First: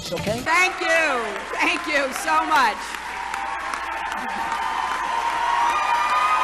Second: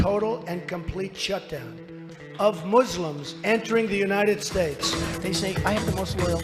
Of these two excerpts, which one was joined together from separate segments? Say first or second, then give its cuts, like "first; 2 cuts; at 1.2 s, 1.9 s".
second; 1 cut; at 4.7 s